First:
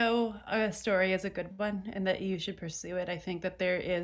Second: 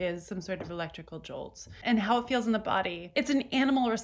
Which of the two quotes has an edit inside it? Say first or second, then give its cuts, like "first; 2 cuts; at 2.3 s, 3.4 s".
second; 2 cuts; at 1.8 s, 3.1 s